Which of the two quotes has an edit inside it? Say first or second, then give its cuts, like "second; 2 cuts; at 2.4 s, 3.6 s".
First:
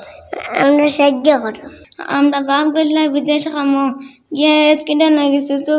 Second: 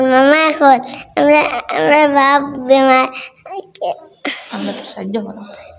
first; 1 cut; at 1.8 s